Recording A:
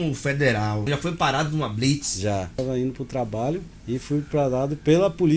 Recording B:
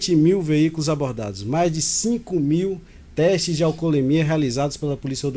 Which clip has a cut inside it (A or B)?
A